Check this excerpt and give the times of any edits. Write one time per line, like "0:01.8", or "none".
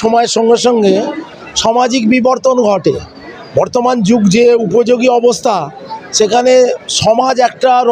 none

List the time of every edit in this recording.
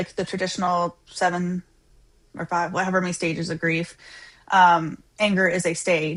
none

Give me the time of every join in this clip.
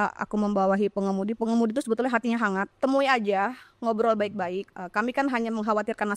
0:02.7
0:04.7

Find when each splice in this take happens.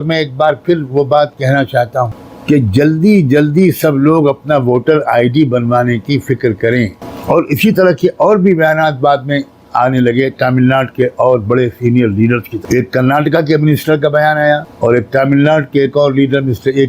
0:02.3
0:07.1
0:12.5
0:14.7

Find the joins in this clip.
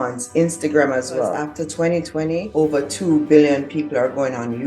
0:01.4
0:02.5

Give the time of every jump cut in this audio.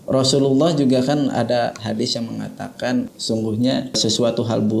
0:03.1
0:04.0

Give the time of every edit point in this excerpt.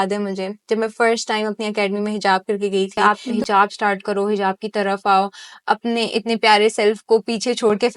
0:02.9

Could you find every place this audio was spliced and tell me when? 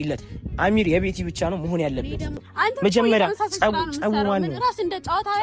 0:02.4

